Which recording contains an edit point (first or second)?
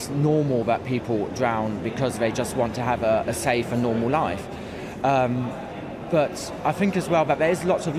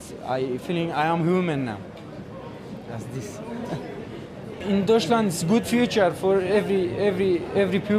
second